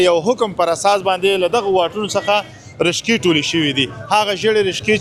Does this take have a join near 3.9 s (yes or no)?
no